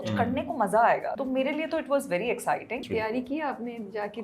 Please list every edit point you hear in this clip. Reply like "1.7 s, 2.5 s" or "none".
1.2 s, 2.8 s